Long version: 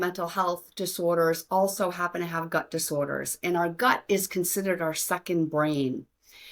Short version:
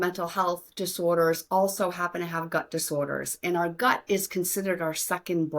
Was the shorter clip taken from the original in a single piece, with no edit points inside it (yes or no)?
yes